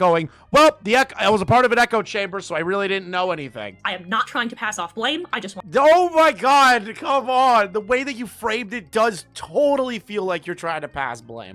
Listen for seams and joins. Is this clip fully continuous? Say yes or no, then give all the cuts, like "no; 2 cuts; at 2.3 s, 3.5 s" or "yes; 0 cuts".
no; 1 cut; at 3.8 s